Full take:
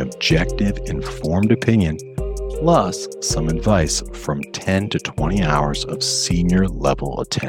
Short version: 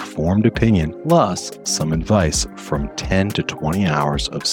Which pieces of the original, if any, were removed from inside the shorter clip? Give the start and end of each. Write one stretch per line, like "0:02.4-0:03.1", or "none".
0:02.0-0:02.5